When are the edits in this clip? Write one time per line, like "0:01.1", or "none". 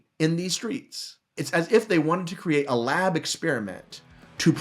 0:01.4